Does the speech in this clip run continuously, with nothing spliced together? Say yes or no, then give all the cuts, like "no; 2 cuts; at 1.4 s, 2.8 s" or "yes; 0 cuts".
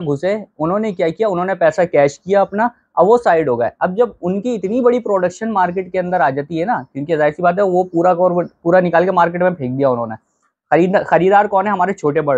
yes; 0 cuts